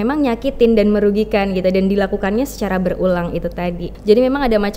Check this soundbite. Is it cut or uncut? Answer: cut